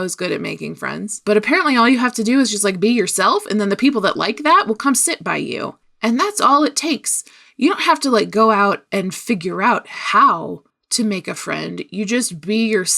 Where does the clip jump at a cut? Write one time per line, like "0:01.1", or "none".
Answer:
0:01.2